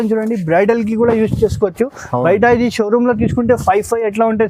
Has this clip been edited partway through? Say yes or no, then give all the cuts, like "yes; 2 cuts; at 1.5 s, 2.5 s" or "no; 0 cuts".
no; 0 cuts